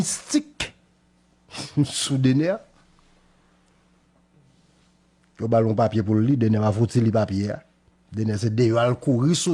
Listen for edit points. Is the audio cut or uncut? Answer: uncut